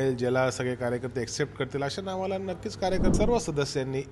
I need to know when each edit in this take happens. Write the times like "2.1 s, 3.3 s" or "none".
3.1 s